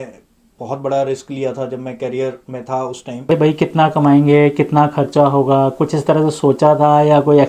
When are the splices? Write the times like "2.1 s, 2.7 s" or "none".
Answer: 3.3 s